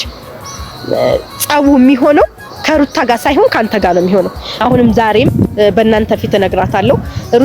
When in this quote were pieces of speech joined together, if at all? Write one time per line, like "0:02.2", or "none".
0:04.4